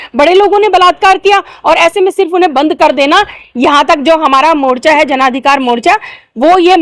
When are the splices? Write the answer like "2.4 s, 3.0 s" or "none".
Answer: none